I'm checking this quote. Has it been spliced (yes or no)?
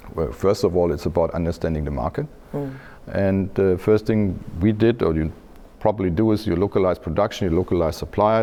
no